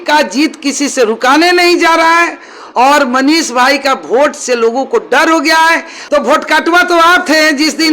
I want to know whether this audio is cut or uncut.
cut